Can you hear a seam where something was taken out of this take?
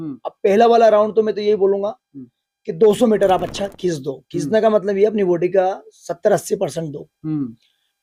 no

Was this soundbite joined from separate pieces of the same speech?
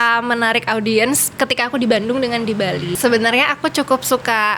yes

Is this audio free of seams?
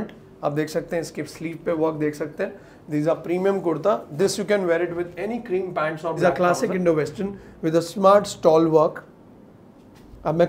no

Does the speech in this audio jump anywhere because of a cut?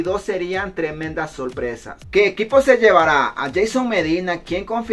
yes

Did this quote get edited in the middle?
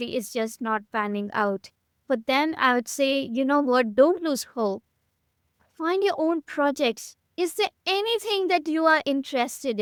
no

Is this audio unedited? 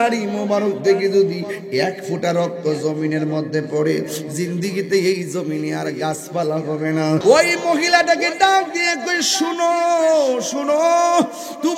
no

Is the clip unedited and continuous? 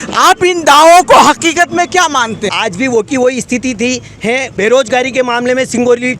no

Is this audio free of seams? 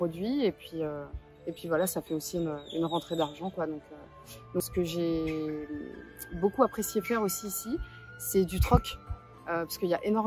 no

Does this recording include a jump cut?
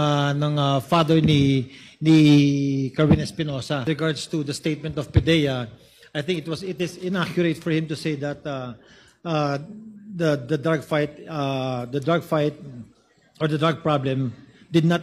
yes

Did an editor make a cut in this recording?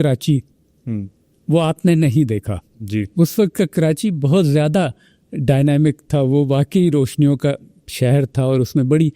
no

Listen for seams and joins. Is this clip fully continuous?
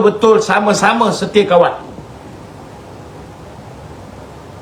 yes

